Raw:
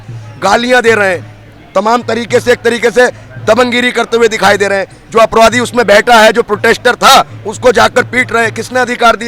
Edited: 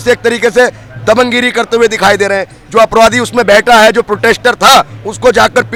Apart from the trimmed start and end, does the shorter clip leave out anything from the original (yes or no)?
no